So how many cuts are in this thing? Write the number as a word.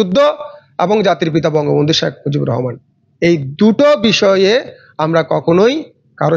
zero